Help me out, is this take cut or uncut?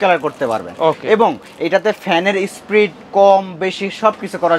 uncut